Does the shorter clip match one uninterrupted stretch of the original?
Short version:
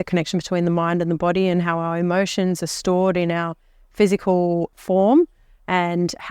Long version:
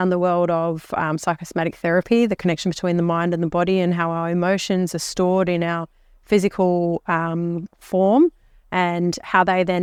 no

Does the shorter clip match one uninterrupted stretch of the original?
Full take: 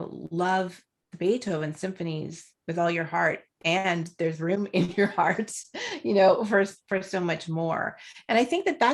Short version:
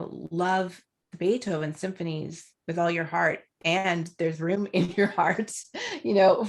yes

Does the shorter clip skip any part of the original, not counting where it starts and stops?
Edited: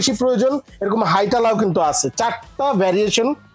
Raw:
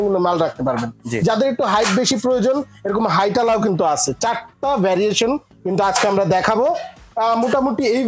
no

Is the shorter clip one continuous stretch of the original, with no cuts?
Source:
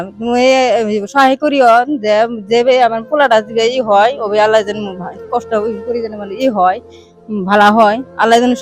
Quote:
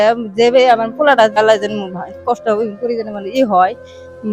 no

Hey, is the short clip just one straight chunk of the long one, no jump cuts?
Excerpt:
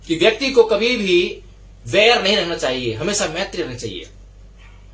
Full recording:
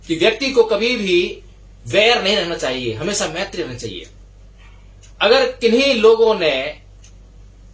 yes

